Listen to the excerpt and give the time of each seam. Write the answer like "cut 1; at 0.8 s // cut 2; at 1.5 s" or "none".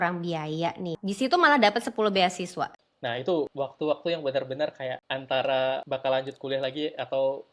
cut 1; at 1.0 s // cut 2; at 2.9 s // cut 3; at 3.5 s // cut 4; at 5.1 s // cut 5; at 5.8 s